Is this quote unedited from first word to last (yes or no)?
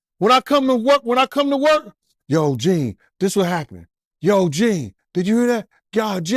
yes